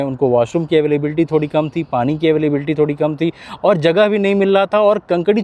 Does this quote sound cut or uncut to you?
uncut